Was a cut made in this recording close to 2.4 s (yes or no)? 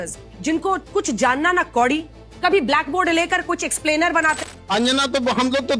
no